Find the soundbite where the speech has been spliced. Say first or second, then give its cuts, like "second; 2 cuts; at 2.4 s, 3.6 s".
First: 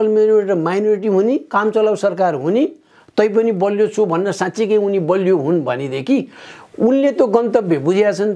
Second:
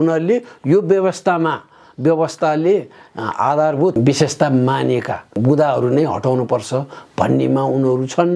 second; 2 cuts; at 4.0 s, 5.4 s